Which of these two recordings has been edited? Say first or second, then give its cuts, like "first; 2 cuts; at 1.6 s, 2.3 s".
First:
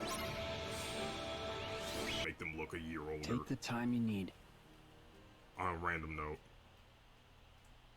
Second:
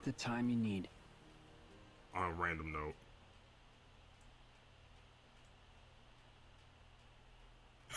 first; 1 cut; at 2.2 s